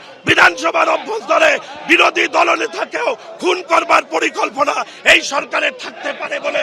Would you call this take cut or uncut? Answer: uncut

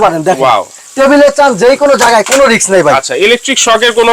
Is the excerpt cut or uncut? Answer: uncut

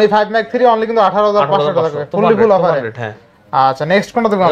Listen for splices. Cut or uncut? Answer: uncut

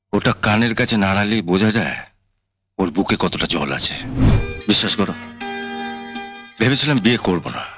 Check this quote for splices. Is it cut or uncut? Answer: cut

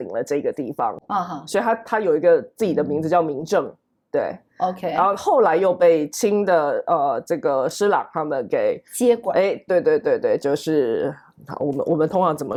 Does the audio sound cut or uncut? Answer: uncut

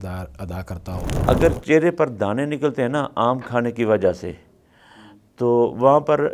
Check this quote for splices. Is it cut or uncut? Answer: cut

